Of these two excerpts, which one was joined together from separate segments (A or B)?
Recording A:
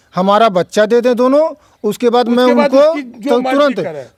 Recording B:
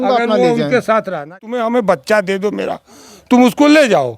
B